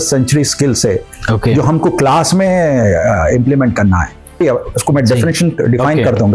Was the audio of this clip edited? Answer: no; 0 cuts

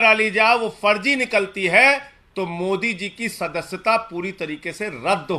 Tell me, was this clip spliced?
no; 0 cuts

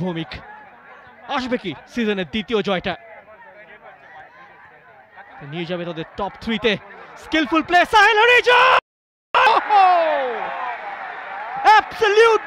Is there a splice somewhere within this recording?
no; 0 cuts

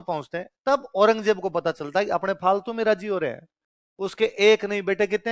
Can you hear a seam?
no; 0 cuts

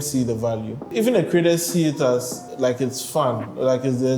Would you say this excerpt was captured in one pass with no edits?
no; 2 cuts; at 0.9 s, 2.4 s

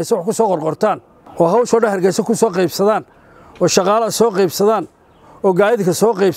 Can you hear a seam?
no; 0 cuts

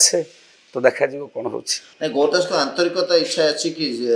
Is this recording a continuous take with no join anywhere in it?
yes; 0 cuts

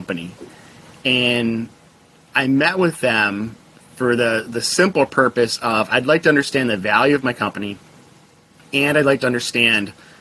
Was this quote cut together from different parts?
no; 0 cuts

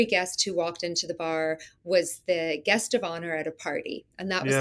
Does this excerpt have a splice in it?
no; 0 cuts

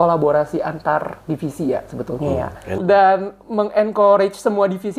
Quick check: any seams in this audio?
yes; 1 cut; at 2.8 s

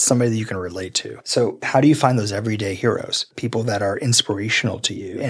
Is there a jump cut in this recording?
yes; 1 cut; at 3.3 s

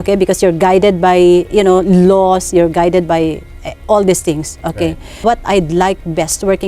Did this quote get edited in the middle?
yes; 1 cut; at 5.2 s

